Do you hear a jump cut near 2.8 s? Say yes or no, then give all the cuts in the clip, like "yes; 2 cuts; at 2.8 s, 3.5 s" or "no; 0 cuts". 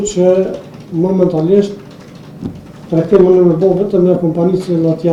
no; 0 cuts